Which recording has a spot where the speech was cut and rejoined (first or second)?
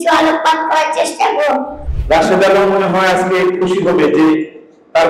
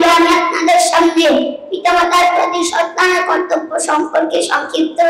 first